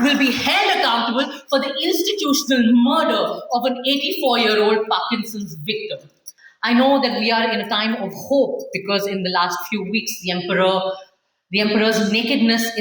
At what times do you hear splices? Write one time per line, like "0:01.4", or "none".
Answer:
0:06.3